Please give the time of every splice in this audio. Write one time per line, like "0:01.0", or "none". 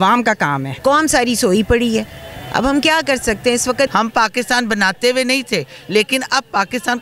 0:00.8
0:03.9